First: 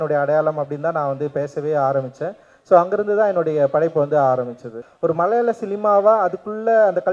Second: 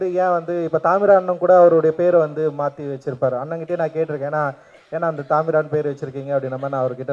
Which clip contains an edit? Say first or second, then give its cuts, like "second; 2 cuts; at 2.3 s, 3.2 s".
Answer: first; 1 cut; at 4.8 s